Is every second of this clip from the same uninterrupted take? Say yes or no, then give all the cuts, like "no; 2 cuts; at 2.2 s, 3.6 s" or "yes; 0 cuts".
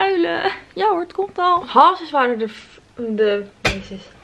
yes; 0 cuts